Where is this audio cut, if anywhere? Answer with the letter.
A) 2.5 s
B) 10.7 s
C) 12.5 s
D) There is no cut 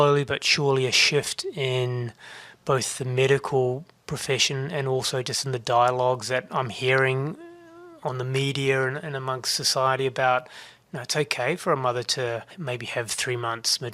C